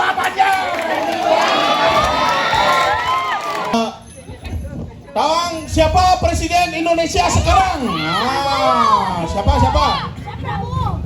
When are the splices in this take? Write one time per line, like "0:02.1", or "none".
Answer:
0:03.7